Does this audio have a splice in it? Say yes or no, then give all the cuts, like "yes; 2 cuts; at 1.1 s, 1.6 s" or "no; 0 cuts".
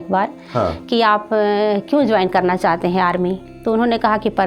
no; 0 cuts